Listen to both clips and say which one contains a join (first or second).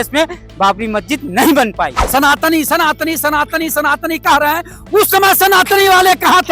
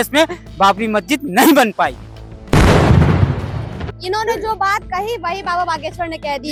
first